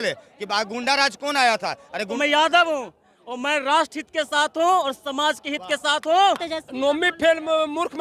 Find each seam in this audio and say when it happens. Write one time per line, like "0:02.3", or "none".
0:02.1
0:06.2